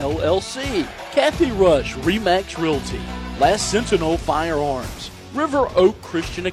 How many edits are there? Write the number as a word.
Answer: one